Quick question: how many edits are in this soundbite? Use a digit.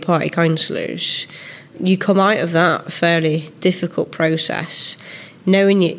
1